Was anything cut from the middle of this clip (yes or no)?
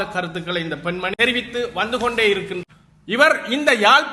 yes